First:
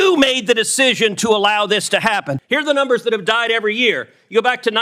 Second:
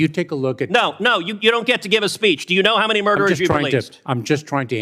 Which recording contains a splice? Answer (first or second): first